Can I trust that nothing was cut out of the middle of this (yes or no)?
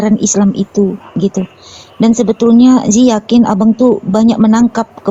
yes